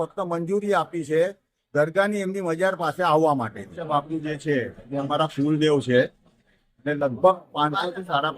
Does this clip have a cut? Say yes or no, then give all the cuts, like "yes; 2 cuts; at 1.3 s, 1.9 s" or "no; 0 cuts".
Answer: yes; 1 cut; at 3.8 s